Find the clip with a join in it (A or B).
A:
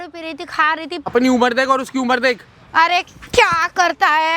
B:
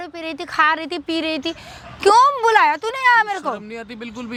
A